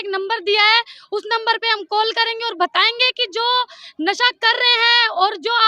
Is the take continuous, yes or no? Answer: yes